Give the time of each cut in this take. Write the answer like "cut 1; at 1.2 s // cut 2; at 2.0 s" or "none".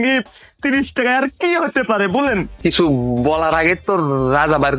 cut 1; at 2.5 s